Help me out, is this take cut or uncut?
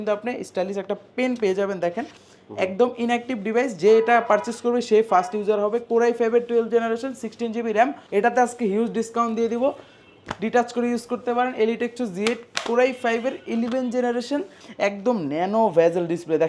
cut